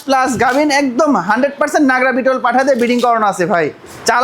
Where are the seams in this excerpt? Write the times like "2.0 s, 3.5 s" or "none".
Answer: none